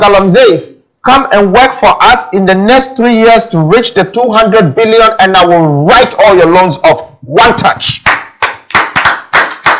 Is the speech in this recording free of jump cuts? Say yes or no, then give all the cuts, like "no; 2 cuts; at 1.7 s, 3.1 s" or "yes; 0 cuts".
yes; 0 cuts